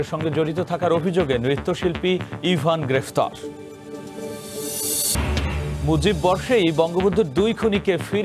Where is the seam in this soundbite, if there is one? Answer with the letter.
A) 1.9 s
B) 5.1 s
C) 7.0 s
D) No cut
B